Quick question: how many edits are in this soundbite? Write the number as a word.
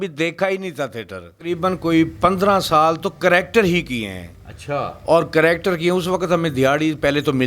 one